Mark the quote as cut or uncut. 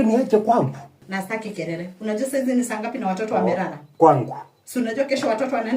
cut